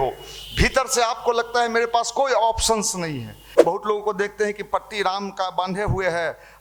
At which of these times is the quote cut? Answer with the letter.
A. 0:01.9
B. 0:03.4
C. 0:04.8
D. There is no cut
B